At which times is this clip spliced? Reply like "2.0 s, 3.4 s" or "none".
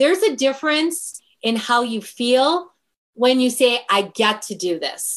none

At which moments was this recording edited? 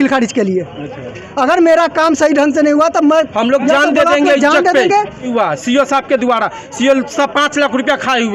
5.3 s

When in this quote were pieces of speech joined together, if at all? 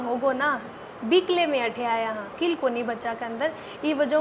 2.3 s

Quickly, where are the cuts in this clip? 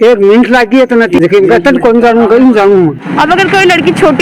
1.2 s, 3.0 s

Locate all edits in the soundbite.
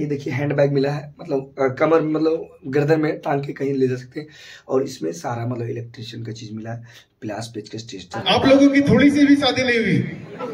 8.2 s

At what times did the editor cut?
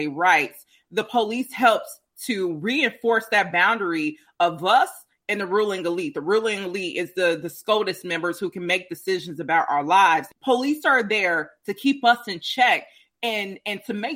10.3 s

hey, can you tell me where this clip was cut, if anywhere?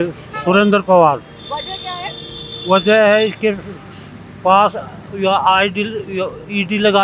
none

